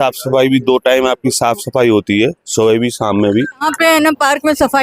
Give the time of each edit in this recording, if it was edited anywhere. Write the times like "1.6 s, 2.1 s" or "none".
3.7 s

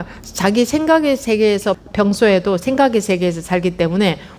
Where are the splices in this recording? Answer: 1.8 s

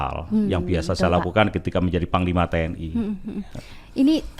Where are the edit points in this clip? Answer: none

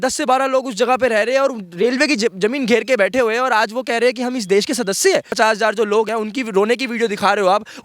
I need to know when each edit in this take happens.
5.3 s, 6.1 s

